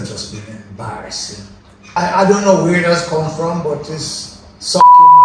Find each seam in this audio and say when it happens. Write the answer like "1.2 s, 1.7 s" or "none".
2.0 s